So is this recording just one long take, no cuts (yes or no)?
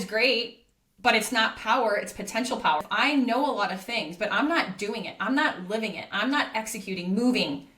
no